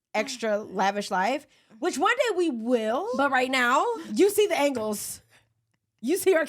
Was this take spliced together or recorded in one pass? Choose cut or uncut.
cut